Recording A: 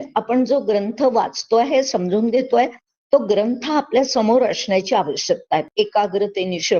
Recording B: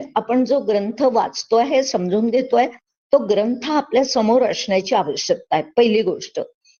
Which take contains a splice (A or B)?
A